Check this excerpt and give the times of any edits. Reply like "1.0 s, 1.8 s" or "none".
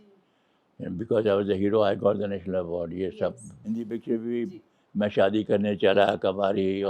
3.5 s